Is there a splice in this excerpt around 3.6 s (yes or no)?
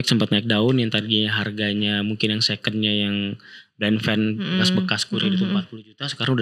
no